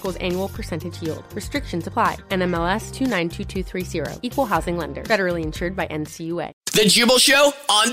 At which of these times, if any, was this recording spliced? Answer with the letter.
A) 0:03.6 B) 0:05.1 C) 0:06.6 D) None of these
C